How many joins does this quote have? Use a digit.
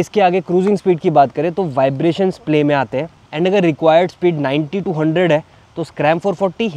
0